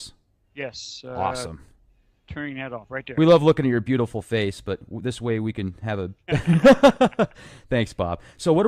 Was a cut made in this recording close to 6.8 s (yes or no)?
no